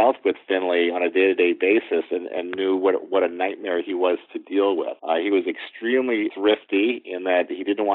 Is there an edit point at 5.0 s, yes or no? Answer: yes